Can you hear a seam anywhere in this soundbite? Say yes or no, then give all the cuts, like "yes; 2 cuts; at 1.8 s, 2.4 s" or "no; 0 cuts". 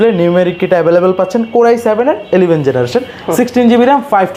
no; 0 cuts